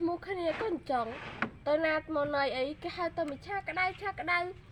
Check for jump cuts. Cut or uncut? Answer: uncut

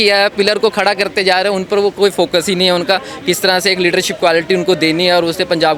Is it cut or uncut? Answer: uncut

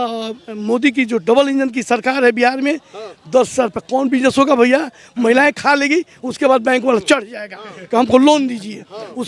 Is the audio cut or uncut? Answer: uncut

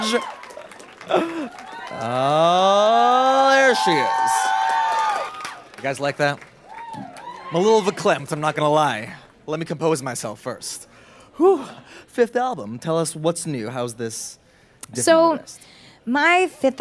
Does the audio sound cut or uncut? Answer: uncut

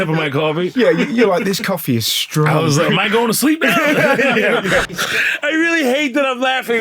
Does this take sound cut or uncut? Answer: cut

